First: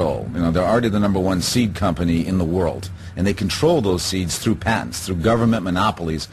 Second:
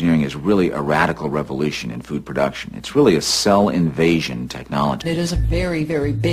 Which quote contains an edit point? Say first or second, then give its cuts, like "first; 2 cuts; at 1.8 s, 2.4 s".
second; 1 cut; at 5.0 s